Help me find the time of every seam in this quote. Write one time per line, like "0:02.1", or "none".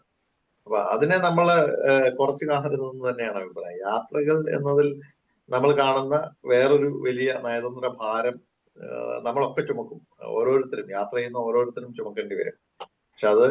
none